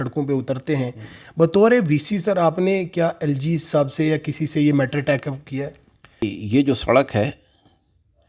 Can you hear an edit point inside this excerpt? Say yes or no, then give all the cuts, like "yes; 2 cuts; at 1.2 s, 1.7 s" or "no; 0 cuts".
yes; 1 cut; at 6.4 s